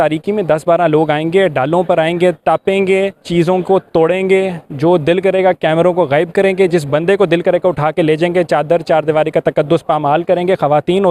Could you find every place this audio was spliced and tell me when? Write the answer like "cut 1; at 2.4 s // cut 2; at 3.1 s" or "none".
cut 1; at 3.2 s // cut 2; at 4.6 s